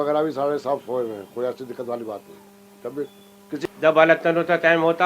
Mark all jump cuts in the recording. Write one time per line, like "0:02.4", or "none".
0:03.7